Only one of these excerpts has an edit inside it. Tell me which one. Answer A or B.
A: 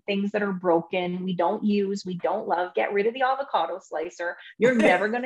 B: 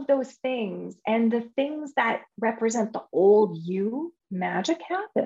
B